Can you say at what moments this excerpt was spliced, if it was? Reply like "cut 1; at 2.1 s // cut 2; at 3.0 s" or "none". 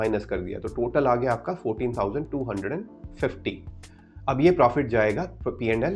none